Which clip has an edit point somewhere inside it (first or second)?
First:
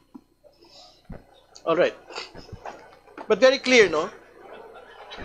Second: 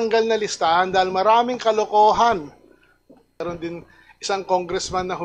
second